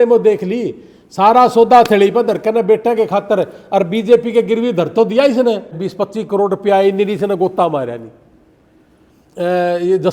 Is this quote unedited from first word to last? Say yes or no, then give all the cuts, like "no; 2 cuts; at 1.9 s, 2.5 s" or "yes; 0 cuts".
no; 1 cut; at 5.9 s